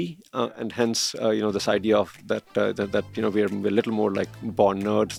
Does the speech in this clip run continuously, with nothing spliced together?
yes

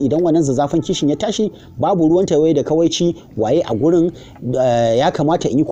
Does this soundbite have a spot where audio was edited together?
no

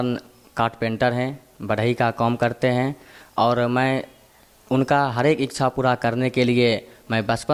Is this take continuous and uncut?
yes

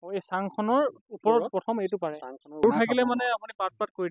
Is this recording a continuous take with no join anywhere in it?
no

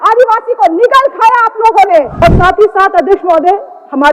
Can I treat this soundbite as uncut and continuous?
no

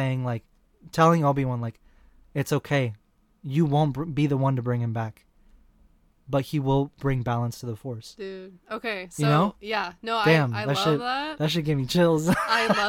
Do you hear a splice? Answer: yes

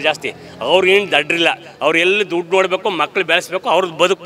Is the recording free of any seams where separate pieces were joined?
yes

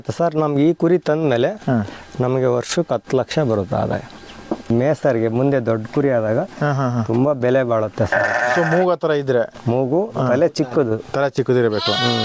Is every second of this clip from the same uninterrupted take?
no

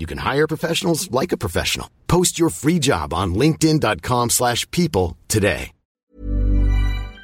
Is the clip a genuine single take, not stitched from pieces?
no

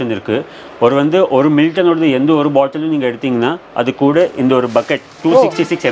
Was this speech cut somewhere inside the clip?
no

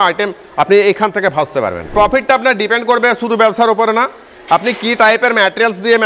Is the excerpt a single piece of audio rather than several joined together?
no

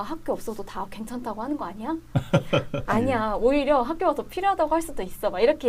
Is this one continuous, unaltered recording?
yes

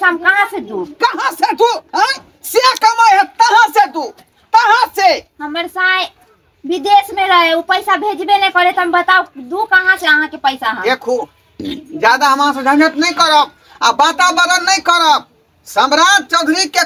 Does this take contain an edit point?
no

